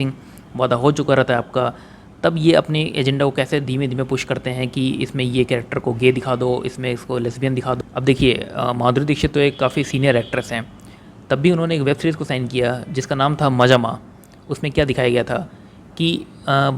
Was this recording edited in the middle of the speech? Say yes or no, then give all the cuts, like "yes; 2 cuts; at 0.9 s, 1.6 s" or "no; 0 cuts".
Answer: yes; 1 cut; at 7.8 s